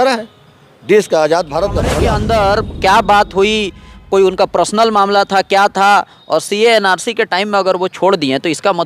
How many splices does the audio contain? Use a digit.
1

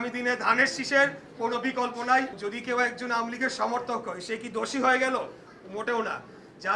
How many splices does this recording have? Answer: 1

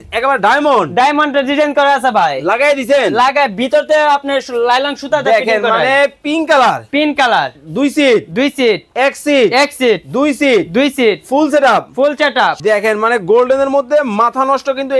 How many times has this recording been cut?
1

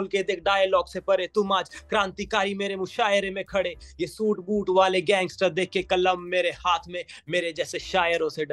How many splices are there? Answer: 0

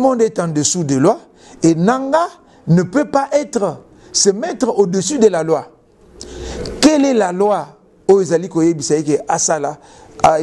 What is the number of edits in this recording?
0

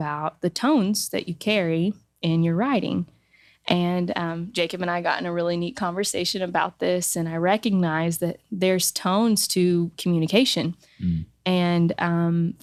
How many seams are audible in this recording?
0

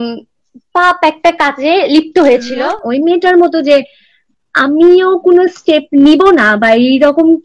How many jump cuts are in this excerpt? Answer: 1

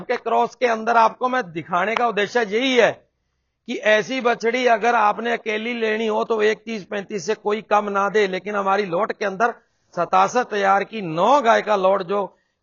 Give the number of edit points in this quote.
0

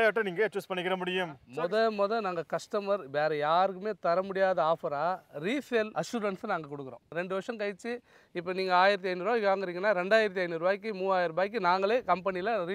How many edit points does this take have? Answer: 2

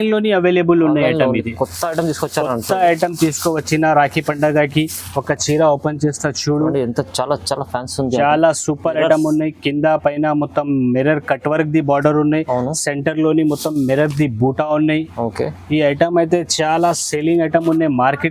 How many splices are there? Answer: 0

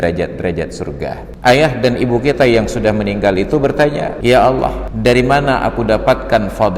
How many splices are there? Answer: 3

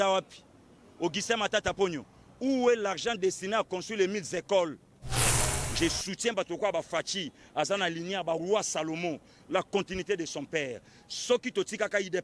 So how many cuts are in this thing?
1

